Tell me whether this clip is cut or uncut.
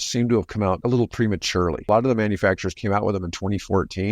cut